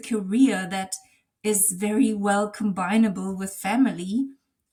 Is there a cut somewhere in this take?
no; 0 cuts

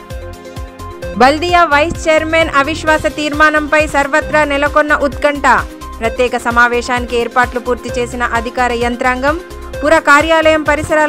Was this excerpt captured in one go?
no; 1 cut; at 0.9 s

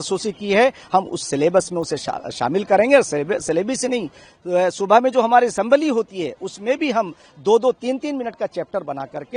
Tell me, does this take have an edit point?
no; 0 cuts

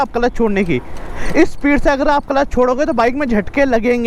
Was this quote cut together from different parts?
no; 0 cuts

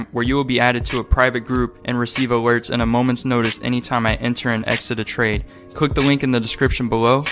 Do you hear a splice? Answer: no; 0 cuts

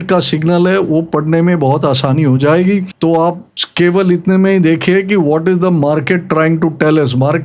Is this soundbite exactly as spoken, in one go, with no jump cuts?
yes; 0 cuts

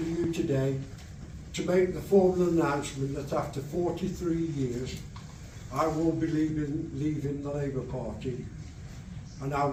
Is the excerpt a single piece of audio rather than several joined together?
yes; 0 cuts

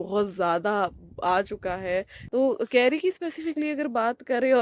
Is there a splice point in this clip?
yes; 1 cut; at 2.2 s

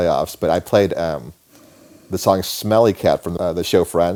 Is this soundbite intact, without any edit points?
yes; 0 cuts

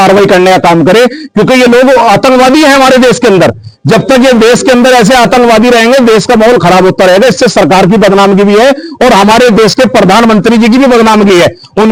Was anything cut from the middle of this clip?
no; 0 cuts

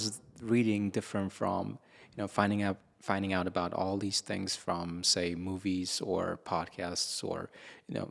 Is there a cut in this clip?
no; 0 cuts

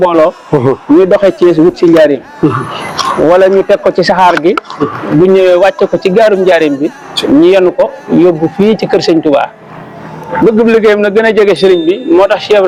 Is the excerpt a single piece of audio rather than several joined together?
yes; 0 cuts

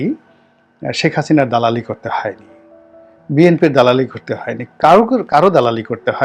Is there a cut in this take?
no; 0 cuts

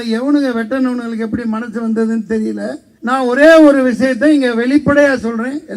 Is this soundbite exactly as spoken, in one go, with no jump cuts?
no; 1 cut; at 2.9 s

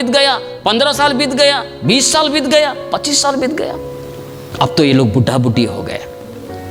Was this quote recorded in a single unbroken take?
yes; 0 cuts

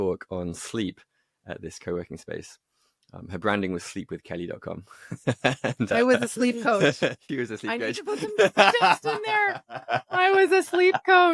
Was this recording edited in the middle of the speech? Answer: no; 0 cuts

